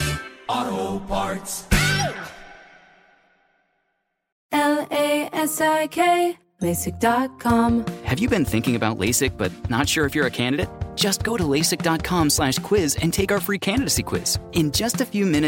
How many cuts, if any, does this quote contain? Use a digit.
2